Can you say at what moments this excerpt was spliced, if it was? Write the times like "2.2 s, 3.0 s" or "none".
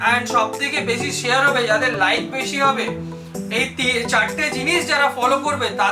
none